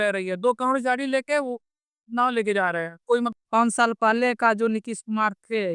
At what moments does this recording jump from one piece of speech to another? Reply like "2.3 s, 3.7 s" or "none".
3.4 s